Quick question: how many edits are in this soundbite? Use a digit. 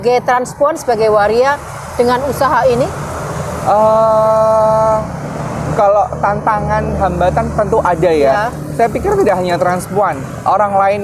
0